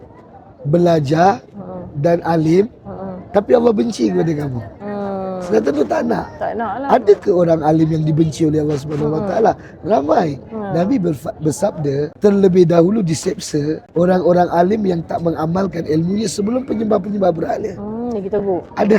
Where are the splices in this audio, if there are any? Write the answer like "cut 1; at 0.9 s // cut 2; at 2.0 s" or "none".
cut 1; at 12.1 s // cut 2; at 13.8 s